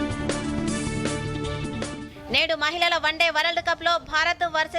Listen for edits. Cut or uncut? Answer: uncut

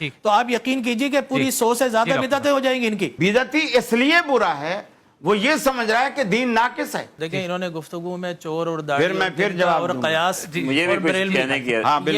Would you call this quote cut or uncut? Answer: cut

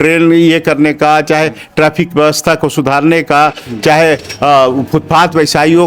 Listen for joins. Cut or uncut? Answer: uncut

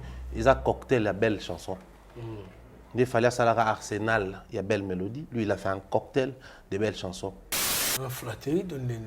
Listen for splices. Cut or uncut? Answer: cut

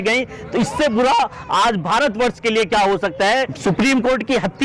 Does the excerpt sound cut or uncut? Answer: cut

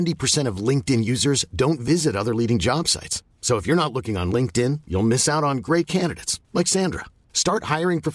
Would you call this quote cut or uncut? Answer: uncut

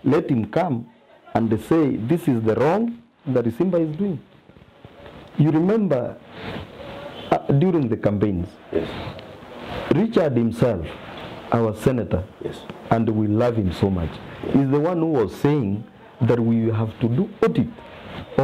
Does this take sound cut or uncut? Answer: uncut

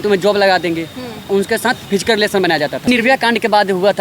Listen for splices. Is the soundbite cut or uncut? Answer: cut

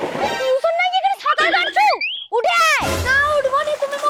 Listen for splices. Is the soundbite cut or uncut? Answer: uncut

